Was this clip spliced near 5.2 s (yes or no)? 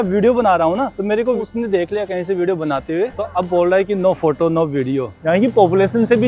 yes